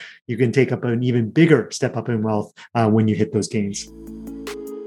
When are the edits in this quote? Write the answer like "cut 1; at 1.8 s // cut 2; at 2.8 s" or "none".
cut 1; at 3.8 s